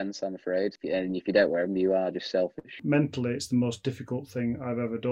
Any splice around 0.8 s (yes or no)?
yes